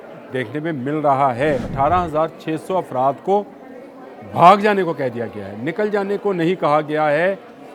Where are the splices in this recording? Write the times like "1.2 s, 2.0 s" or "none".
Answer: 1.7 s